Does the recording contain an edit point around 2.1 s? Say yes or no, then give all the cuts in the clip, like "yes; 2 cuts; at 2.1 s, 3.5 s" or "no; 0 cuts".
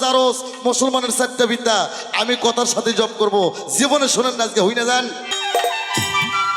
no; 1 cut; at 5.3 s